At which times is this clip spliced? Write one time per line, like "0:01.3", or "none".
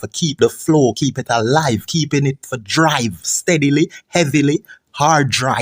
none